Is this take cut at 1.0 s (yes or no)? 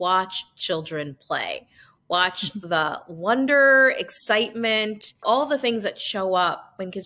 no